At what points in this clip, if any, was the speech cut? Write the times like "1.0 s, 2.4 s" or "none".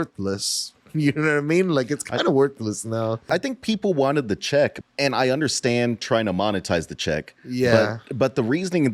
3.3 s, 4.8 s